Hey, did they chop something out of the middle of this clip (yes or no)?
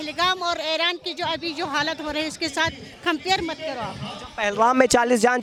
no